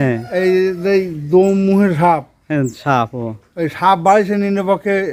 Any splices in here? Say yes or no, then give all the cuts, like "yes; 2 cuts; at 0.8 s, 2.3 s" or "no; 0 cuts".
no; 0 cuts